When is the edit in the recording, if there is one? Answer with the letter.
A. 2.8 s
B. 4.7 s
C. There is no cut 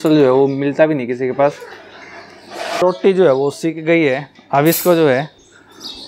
A